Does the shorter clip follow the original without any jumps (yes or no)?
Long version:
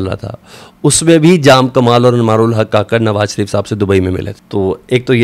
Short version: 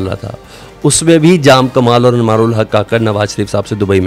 yes